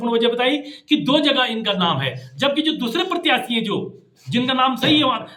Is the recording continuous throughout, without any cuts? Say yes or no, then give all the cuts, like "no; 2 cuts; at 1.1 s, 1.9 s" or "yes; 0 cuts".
yes; 0 cuts